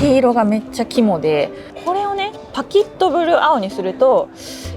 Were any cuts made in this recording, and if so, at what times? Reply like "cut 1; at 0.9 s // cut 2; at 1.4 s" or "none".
cut 1; at 1.7 s